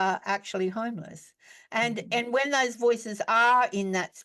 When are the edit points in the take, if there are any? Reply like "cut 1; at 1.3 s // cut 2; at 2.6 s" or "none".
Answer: none